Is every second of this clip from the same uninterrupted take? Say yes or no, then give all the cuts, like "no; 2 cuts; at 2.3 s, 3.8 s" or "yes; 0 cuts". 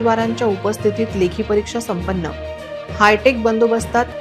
yes; 0 cuts